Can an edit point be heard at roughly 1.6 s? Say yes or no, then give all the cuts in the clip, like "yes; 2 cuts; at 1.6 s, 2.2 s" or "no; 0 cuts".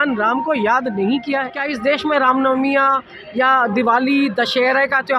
yes; 1 cut; at 1.6 s